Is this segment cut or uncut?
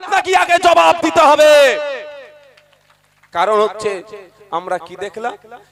uncut